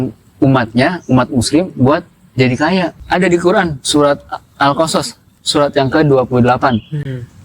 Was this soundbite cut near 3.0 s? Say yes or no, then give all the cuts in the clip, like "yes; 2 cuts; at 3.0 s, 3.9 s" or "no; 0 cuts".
yes; 1 cut; at 3.0 s